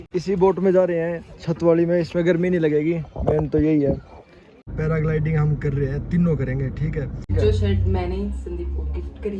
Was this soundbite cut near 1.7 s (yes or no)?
no